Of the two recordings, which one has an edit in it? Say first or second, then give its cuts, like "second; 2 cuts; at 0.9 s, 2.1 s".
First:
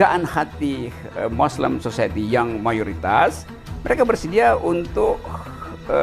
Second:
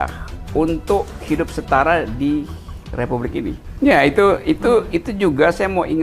second; 1 cut; at 3.7 s